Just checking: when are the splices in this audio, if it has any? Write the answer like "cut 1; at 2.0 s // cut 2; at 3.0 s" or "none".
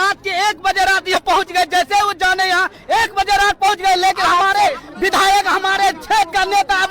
cut 1; at 1.2 s